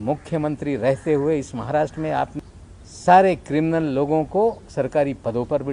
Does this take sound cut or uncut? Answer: cut